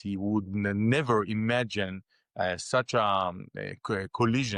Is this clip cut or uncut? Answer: uncut